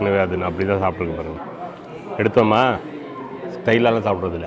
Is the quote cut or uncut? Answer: uncut